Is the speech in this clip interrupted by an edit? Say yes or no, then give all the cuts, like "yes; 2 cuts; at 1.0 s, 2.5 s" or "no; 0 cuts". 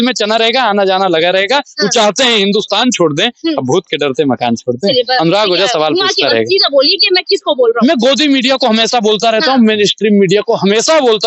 no; 0 cuts